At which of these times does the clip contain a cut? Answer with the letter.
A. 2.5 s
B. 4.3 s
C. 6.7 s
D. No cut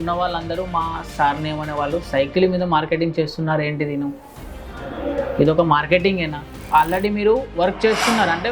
C